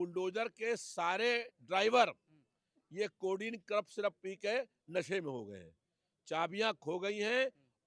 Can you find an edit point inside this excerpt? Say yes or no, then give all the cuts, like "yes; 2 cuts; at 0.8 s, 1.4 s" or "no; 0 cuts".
no; 0 cuts